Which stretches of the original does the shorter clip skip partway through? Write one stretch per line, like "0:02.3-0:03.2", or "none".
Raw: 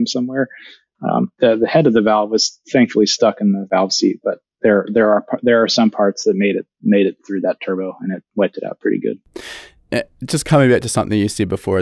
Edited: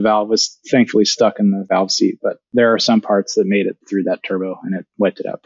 0:04.4-0:05.3
0:06.7-0:07.2